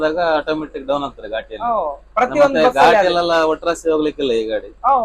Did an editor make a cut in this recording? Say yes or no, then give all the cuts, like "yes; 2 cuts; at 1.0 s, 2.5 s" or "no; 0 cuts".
no; 0 cuts